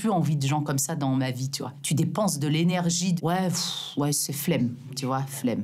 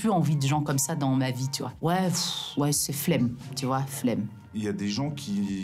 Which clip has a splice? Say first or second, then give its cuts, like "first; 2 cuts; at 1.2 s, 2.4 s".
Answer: second; 2 cuts; at 1.8 s, 4.5 s